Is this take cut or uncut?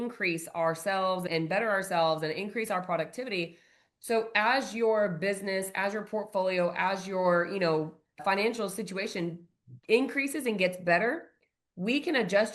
uncut